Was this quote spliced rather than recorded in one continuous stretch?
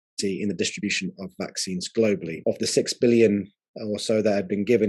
yes; 1 cut; at 2.3 s

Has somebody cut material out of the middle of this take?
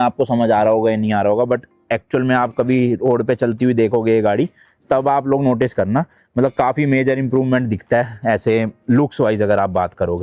no; 0 cuts

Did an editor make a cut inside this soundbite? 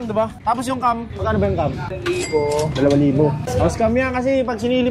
yes; 2 cuts; at 2.0 s, 3.5 s

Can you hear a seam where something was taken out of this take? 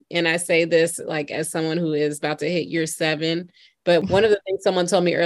yes; 1 cut; at 4.0 s

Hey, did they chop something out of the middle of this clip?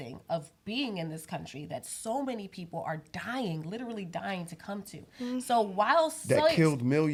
no; 0 cuts

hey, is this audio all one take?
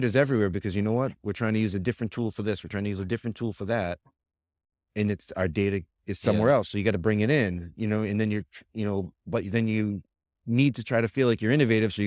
yes; 0 cuts

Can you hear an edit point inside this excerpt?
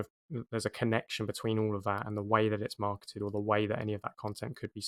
no; 0 cuts

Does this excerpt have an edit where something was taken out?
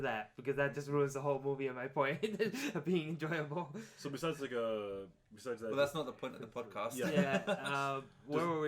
yes; 1 cut; at 4.8 s

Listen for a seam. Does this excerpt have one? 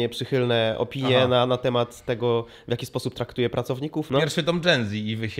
yes; 1 cut; at 4.1 s

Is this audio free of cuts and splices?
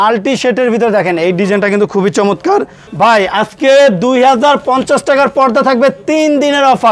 no; 1 cut; at 2.8 s

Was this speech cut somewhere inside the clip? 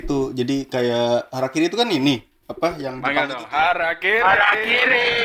no; 0 cuts

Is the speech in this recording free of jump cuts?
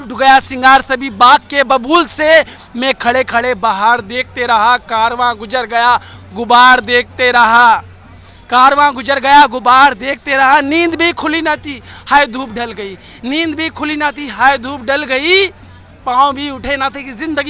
yes; 0 cuts

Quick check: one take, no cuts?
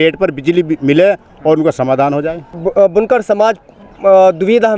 no; 1 cut; at 2.4 s

